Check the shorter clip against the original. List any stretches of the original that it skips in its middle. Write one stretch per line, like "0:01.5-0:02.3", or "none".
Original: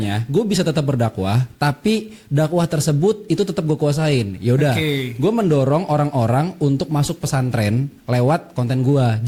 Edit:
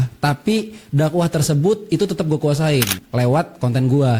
0:04.3-0:07.9